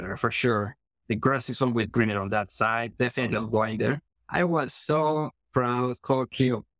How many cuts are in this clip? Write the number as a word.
one